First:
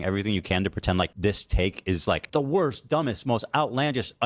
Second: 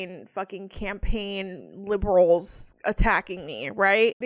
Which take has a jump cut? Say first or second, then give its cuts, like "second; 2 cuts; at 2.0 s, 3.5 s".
first; 2 cuts; at 1.1 s, 2.2 s